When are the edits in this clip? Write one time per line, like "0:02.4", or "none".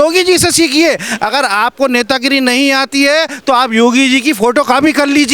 none